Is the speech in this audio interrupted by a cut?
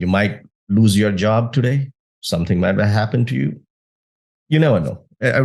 no; 0 cuts

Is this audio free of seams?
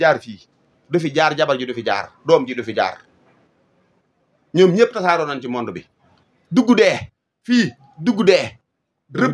yes; 0 cuts

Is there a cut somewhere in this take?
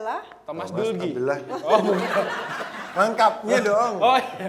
no; 0 cuts

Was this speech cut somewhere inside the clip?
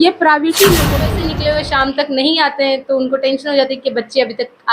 yes; 1 cut; at 1.2 s

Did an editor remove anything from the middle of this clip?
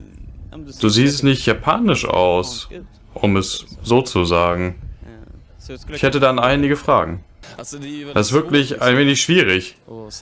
no; 0 cuts

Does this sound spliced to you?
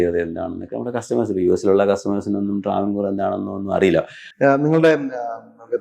yes; 1 cut; at 4.2 s

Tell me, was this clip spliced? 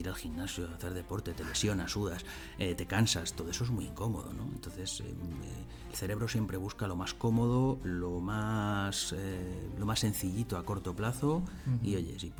no; 0 cuts

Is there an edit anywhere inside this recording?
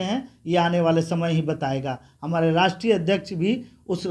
no; 0 cuts

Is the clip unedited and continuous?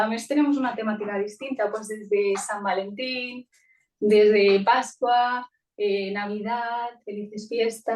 yes; 0 cuts

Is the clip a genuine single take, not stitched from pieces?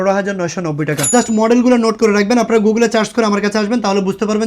no; 1 cut; at 1.1 s

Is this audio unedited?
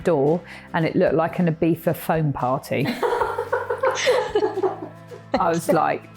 no; 1 cut; at 5.2 s

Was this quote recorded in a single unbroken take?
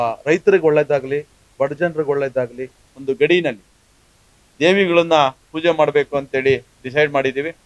no; 1 cut; at 2.9 s

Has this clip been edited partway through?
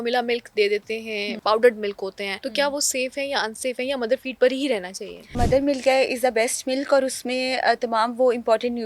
yes; 3 cuts; at 1.4 s, 2.3 s, 5.4 s

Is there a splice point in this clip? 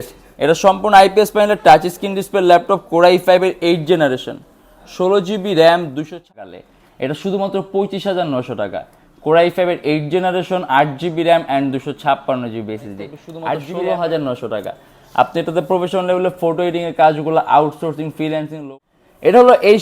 yes; 3 cuts; at 6.3 s, 13.6 s, 18.5 s

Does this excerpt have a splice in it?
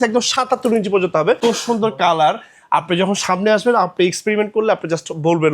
yes; 1 cut; at 1.4 s

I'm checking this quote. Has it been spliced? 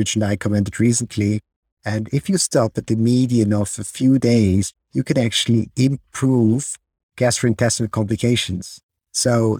yes; 1 cut; at 4.8 s

